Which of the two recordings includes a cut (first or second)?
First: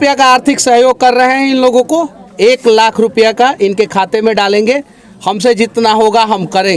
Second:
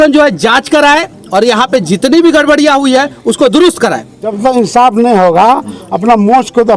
second